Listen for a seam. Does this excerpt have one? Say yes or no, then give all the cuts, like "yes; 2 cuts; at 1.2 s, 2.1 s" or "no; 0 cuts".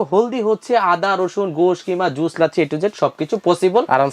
no; 0 cuts